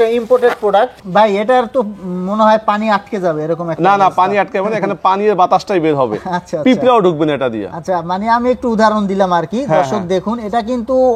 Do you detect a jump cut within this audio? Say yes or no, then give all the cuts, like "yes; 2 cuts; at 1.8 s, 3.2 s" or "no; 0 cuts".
yes; 1 cut; at 1.0 s